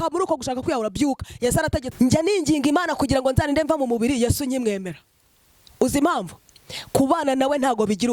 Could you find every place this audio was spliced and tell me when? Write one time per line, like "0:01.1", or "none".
0:01.9

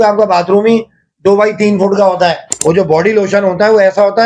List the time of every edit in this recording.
0:02.5

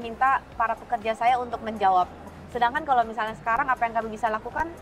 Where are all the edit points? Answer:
0:02.3

